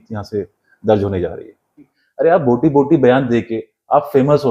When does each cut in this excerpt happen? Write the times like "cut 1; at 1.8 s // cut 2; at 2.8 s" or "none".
cut 1; at 2.0 s